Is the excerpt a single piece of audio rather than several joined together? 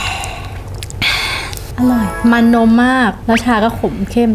no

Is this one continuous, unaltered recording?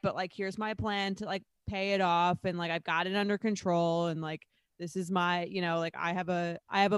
yes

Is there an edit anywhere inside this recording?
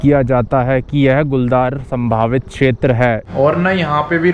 yes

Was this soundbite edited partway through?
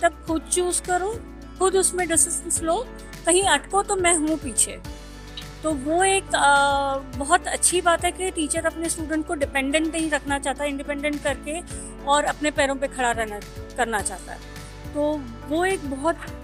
no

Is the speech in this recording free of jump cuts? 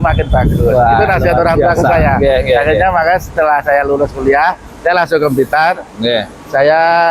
yes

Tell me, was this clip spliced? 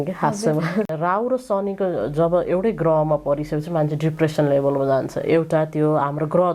yes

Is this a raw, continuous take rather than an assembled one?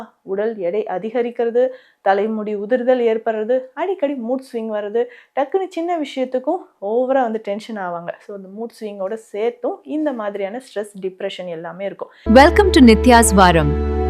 no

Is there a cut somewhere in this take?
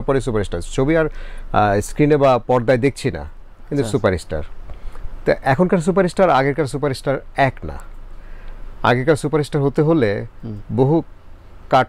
no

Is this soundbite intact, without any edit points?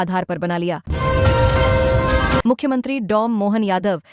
no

